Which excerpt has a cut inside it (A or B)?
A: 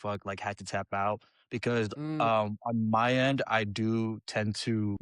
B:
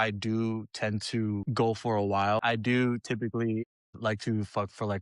B